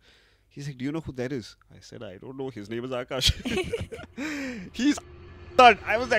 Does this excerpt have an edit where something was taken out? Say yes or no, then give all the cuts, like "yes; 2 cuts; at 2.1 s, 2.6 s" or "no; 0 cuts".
no; 0 cuts